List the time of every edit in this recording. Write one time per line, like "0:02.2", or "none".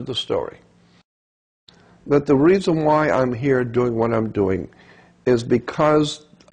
0:01.4